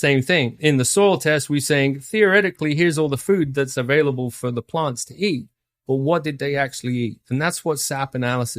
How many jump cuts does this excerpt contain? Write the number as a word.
zero